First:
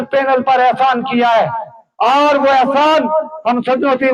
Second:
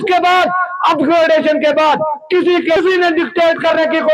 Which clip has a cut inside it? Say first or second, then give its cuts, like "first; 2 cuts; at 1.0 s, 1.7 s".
second; 1 cut; at 2.8 s